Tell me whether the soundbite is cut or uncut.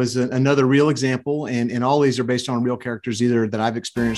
uncut